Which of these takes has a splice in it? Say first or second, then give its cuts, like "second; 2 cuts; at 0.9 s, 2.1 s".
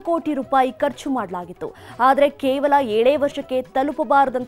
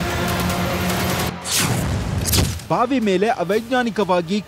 second; 1 cut; at 1.3 s